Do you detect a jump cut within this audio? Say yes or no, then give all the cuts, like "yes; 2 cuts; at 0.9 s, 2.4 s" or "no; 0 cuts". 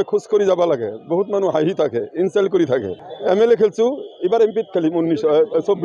no; 0 cuts